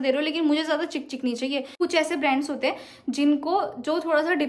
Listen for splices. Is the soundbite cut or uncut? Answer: cut